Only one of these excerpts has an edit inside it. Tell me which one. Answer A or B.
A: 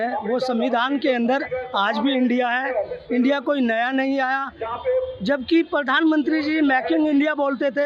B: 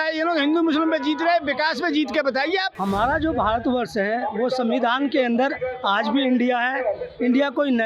B